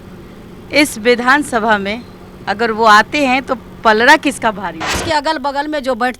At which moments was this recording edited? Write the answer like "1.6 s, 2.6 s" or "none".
5.0 s

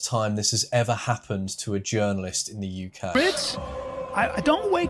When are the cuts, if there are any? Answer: 3.1 s

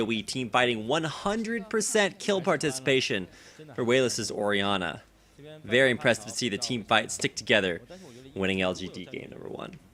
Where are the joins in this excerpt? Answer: none

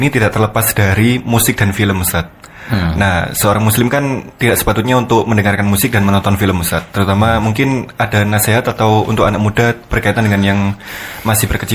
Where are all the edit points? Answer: none

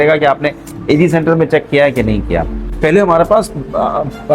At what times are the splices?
2.6 s

